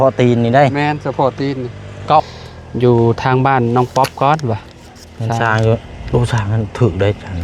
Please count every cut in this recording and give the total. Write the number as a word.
one